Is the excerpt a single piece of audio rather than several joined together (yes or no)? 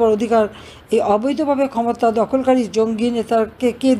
yes